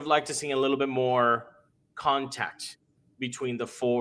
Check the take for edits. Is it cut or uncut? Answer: uncut